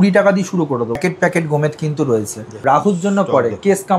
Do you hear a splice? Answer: yes; 2 cuts; at 1.0 s, 2.5 s

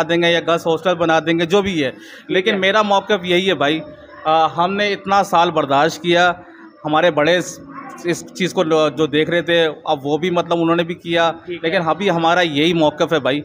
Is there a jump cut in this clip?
no; 0 cuts

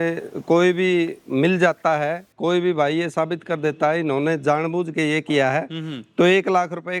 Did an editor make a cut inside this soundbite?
no; 0 cuts

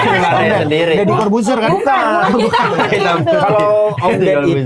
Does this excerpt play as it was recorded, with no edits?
yes; 0 cuts

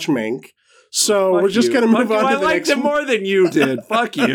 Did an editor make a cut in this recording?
no; 0 cuts

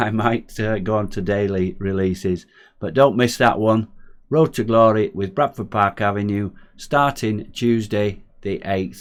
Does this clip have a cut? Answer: no; 0 cuts

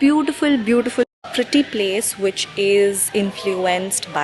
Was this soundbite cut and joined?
yes; 1 cut; at 1.3 s

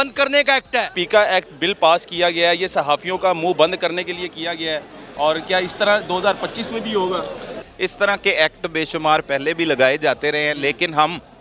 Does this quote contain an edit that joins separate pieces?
yes; 2 cuts; at 1.0 s, 7.6 s

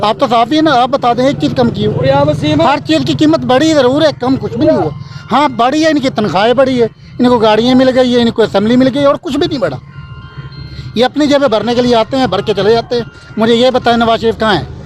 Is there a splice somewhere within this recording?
no; 0 cuts

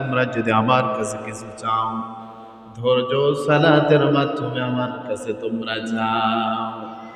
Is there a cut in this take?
no; 0 cuts

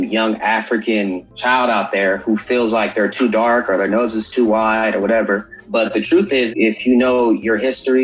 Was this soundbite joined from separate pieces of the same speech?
yes; 3 cuts; at 1.3 s, 5.6 s, 6.5 s

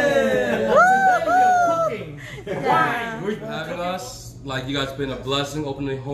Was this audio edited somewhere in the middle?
yes; 1 cut; at 3.5 s

